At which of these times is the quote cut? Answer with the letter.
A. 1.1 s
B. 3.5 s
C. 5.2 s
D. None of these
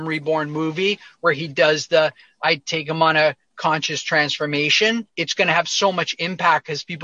C